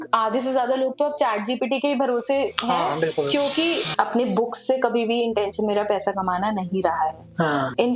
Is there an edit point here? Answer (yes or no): yes